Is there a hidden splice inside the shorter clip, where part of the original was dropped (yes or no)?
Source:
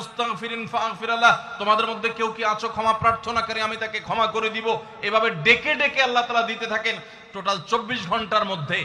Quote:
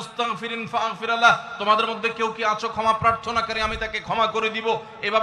no